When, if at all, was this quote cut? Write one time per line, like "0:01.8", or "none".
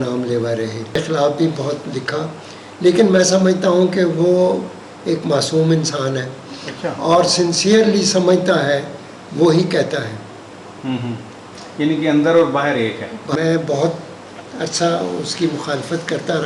0:01.0
0:13.3